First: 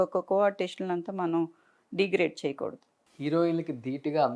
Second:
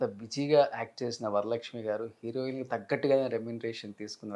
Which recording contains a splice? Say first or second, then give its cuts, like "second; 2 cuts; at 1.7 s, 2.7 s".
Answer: first; 1 cut; at 3.0 s